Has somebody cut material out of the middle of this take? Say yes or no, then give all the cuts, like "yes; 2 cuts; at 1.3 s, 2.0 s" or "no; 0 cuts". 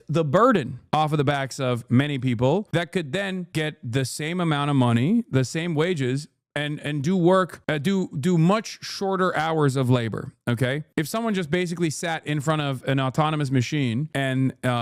no; 0 cuts